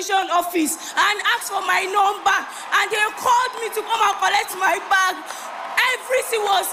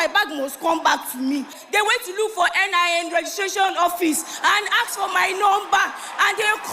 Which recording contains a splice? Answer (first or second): second